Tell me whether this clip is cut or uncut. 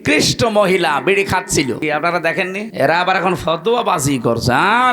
cut